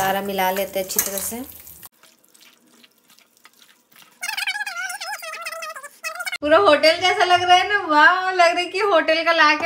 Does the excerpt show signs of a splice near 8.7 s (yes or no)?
no